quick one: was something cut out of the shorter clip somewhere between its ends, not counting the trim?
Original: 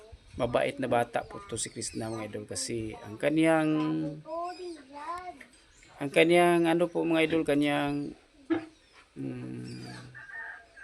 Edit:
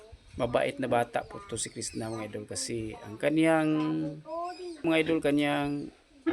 yes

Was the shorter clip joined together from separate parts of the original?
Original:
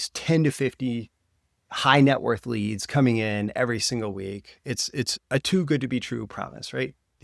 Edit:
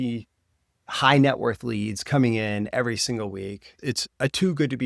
yes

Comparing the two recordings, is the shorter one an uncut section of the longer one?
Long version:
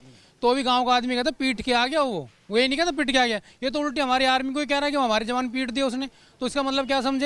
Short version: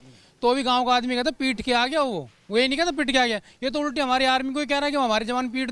yes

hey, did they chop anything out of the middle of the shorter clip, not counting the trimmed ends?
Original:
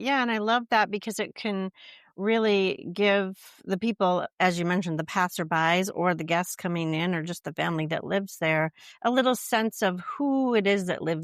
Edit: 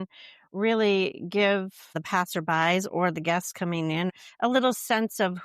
yes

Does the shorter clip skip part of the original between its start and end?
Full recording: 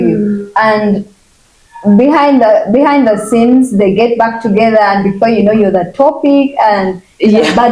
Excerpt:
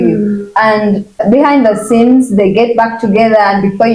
yes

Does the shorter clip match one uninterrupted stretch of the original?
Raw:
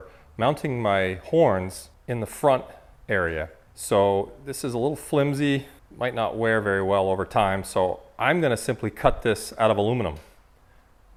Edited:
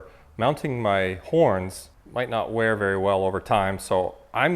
no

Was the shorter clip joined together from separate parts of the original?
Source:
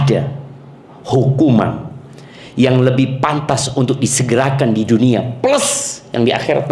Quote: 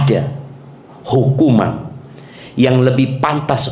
no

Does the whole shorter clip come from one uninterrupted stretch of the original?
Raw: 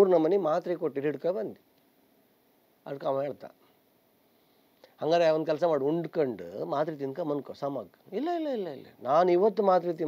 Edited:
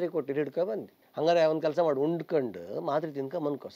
no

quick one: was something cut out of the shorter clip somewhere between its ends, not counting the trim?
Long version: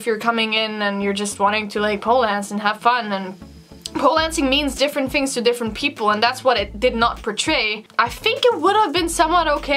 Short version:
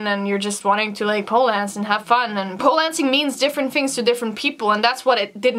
yes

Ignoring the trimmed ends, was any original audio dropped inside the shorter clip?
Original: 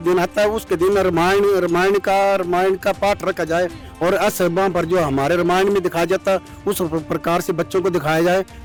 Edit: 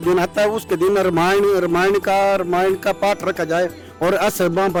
no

